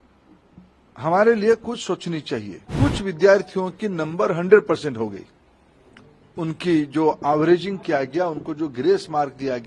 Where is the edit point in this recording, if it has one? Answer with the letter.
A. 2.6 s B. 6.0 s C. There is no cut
A